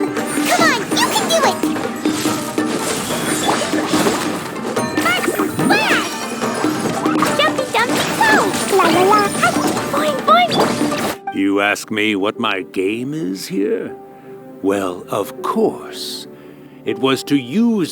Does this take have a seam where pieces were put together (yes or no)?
yes